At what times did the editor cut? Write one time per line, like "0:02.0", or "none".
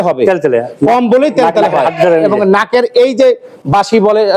none